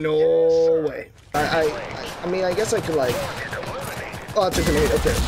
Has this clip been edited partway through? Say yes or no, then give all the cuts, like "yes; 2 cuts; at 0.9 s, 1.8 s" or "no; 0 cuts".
yes; 1 cut; at 1.3 s